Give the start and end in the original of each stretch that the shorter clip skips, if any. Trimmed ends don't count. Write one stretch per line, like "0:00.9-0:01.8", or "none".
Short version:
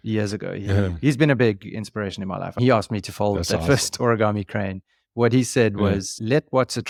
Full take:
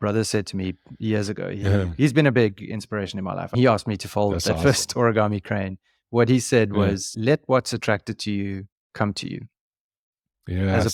none